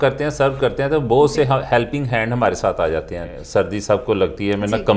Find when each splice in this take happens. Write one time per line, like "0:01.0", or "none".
0:03.4